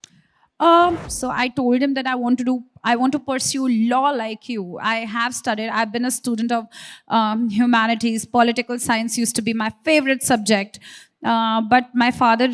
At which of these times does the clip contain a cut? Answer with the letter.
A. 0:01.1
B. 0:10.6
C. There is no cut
A